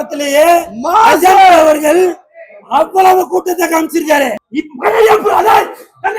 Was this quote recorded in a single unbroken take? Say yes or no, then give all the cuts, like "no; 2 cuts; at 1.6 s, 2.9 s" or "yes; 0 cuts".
no; 1 cut; at 4.3 s